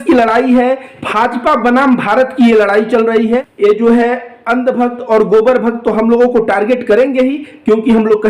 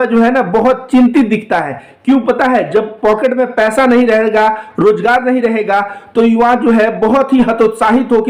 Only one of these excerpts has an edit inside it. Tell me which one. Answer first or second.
first